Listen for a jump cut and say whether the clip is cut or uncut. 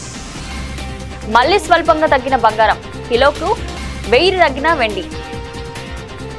cut